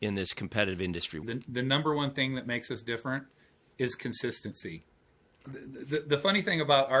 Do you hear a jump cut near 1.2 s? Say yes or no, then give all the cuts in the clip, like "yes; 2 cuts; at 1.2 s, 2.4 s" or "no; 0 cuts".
yes; 1 cut; at 1.2 s